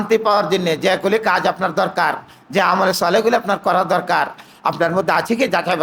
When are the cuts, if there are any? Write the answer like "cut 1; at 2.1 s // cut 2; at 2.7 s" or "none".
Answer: none